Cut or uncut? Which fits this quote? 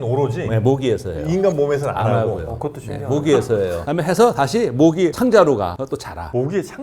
uncut